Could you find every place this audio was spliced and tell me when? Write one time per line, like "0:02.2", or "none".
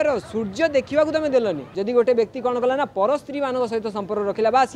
0:01.7